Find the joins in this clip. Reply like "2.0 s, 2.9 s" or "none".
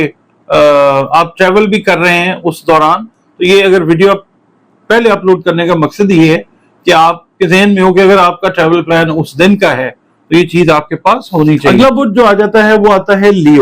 11.7 s